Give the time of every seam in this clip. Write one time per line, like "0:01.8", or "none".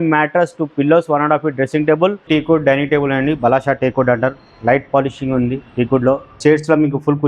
0:02.2
0:06.4

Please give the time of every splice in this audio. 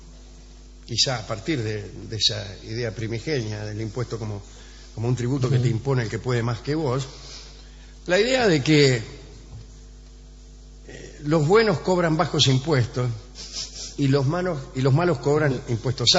0:05.7

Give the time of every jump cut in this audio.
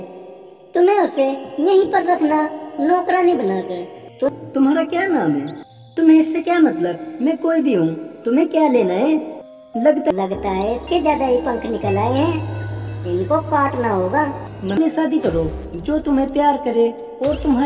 0:04.3
0:10.1
0:14.7

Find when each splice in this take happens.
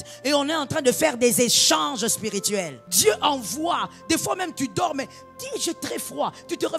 0:02.8

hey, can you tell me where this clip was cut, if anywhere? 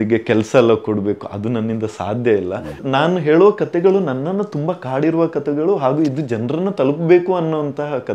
0:02.8

